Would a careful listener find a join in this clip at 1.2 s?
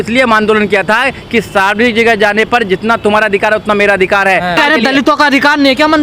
no; 1 cut; at 4.6 s

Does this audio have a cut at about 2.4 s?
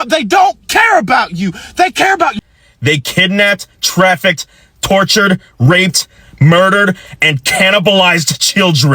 yes; 1 cut; at 2.4 s

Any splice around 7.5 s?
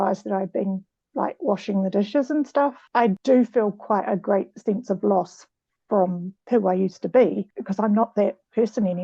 yes; 3 cuts; at 2.9 s, 6.3 s, 7.5 s

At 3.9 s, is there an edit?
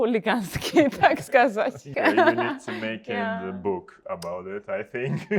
no; 1 cut; at 1.8 s

